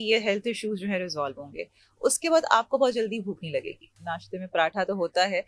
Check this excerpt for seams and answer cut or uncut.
cut